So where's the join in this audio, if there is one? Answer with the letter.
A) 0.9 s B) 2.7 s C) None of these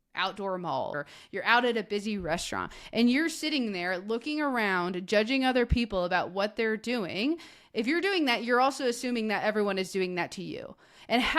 A